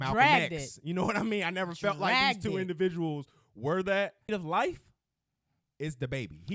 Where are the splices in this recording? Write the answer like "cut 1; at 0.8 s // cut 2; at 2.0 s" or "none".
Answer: cut 1; at 4.3 s